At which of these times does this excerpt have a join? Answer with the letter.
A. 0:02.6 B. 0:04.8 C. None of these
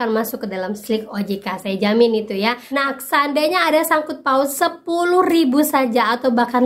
A